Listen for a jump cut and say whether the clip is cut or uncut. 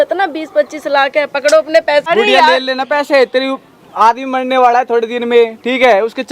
cut